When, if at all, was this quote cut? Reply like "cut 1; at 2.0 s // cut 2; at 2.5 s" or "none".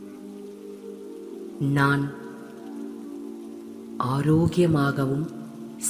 cut 1; at 1.6 s // cut 2; at 2.1 s // cut 3; at 4.0 s